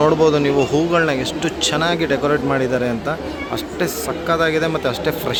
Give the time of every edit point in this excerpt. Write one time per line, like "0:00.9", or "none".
none